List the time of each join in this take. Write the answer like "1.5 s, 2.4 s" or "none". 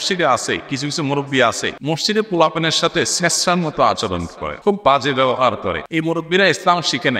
1.7 s, 4.4 s, 5.8 s

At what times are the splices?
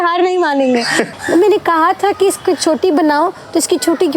1.1 s

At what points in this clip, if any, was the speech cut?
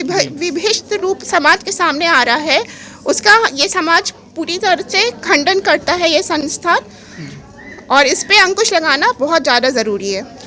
none

